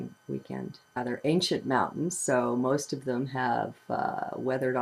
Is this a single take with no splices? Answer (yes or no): yes